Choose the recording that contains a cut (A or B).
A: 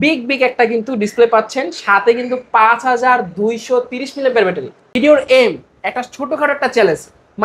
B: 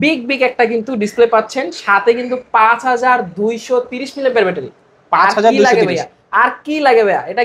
A